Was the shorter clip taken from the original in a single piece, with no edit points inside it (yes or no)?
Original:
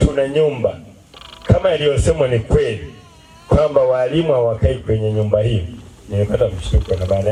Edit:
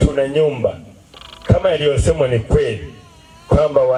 yes